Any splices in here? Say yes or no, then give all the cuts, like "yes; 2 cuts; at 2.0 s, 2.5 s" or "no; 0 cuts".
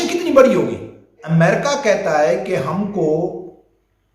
yes; 1 cut; at 1.2 s